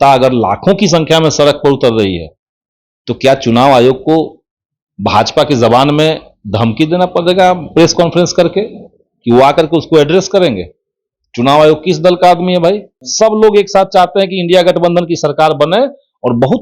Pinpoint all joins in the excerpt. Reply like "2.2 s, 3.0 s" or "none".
13.0 s